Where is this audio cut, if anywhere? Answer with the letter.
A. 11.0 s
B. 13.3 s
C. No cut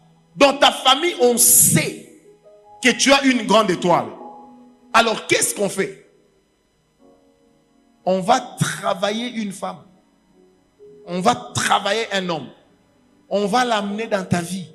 C